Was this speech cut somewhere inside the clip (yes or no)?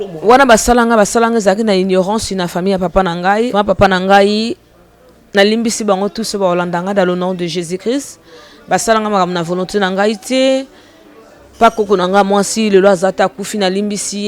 yes